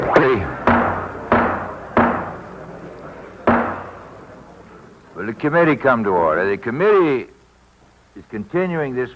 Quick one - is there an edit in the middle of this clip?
yes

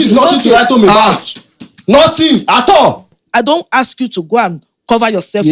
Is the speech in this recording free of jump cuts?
no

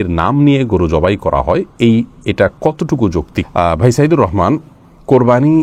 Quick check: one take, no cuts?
yes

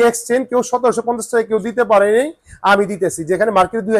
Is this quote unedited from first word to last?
yes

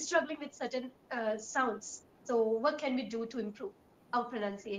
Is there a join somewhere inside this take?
no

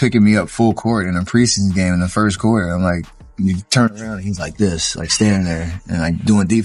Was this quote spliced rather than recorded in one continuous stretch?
no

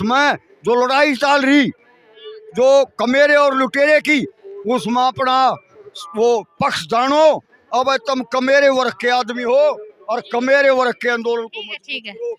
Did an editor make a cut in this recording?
no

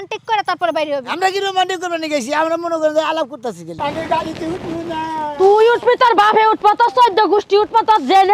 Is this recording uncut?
no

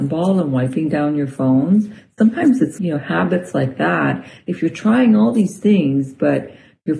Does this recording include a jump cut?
yes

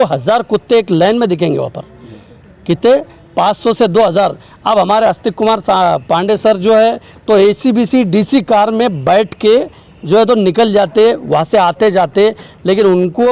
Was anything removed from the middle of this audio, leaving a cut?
no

